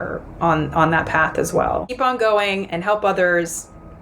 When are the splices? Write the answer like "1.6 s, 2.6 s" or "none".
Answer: 1.9 s